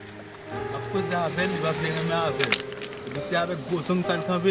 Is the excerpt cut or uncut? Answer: cut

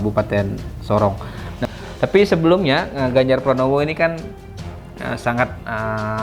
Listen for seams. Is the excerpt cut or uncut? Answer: cut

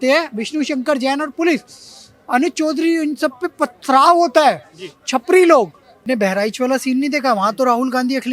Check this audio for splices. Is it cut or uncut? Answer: cut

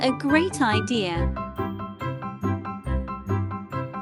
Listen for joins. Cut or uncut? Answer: uncut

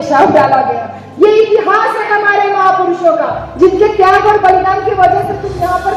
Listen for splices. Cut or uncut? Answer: uncut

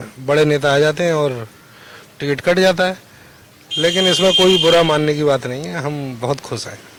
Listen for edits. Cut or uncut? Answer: uncut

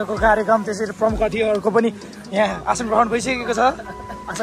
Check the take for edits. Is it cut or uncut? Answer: uncut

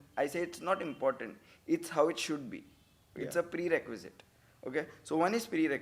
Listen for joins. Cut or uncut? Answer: uncut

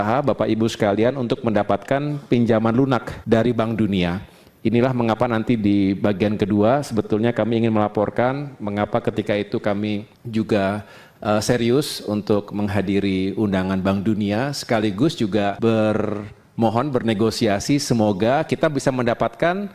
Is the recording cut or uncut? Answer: uncut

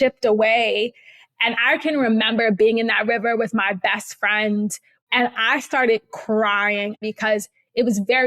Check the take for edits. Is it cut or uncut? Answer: cut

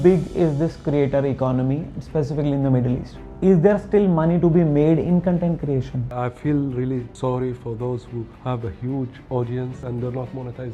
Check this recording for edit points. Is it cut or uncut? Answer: cut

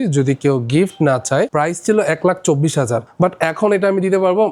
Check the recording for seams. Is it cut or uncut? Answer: cut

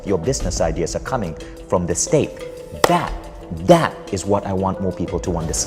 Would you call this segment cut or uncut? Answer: uncut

